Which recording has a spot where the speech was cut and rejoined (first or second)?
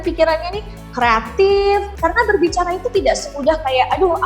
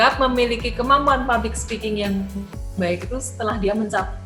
first